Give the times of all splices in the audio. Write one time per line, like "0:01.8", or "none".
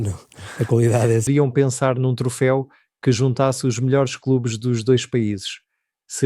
0:01.3